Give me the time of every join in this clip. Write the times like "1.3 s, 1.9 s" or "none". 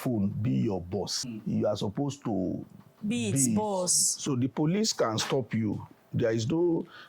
1.3 s, 4.1 s